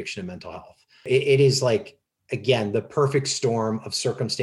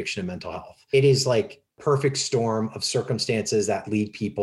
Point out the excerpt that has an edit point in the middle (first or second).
second